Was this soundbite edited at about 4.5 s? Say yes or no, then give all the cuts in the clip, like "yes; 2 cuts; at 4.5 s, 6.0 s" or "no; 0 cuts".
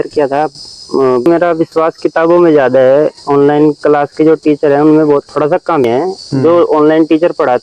no; 2 cuts; at 1.3 s, 5.8 s